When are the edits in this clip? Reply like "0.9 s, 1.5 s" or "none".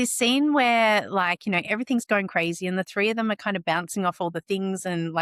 none